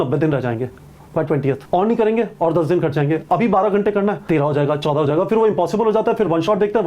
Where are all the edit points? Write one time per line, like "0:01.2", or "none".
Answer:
0:01.6
0:04.2